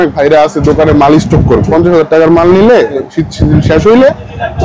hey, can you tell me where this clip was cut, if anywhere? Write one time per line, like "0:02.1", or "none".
0:01.7
0:03.0